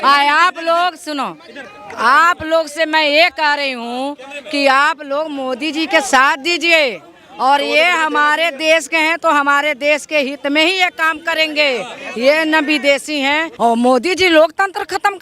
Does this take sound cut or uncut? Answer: cut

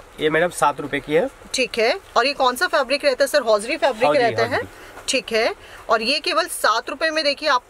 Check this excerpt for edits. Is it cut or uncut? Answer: uncut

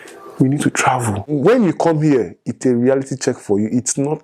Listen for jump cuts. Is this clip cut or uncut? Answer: cut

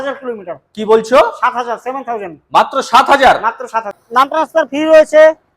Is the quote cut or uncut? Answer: cut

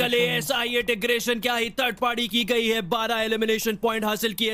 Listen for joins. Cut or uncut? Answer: uncut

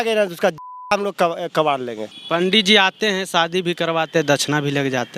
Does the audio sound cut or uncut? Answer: cut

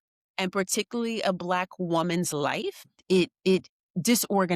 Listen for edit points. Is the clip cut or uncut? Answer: cut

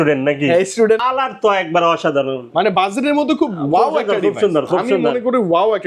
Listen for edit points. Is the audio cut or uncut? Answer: cut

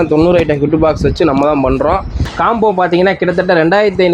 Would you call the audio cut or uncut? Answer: cut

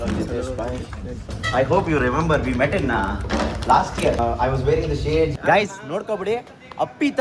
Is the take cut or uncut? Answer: cut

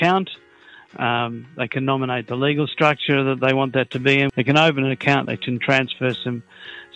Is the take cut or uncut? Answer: cut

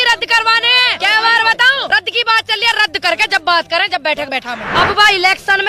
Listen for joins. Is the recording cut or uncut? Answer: cut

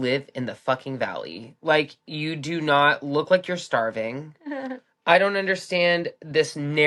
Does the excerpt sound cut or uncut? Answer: uncut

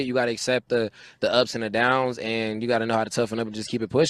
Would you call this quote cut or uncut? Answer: cut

